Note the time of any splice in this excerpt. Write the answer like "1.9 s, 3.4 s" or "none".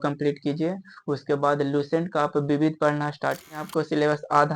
3.6 s